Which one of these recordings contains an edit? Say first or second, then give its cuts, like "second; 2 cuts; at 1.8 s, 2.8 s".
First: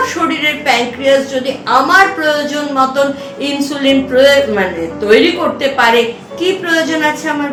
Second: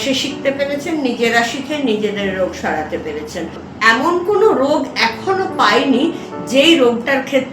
second; 1 cut; at 3.6 s